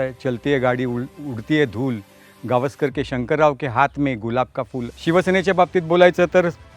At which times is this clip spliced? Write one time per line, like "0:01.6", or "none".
0:04.9